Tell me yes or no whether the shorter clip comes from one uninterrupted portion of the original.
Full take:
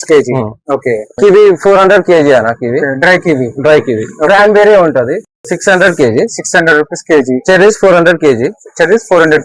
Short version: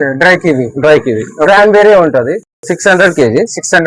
yes